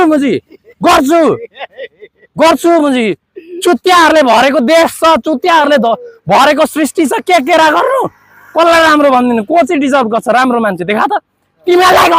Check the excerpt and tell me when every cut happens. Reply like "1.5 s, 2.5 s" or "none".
none